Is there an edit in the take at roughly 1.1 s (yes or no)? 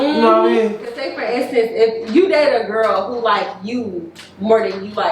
yes